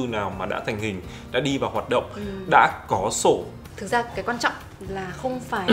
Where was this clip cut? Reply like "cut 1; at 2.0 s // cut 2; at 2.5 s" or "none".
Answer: cut 1; at 3.7 s